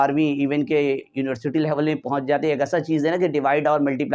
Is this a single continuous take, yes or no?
yes